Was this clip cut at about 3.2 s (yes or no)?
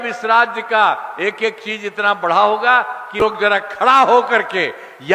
yes